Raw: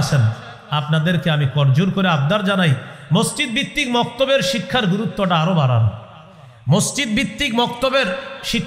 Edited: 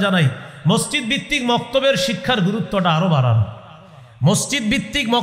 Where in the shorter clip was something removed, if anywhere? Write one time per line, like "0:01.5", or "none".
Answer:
none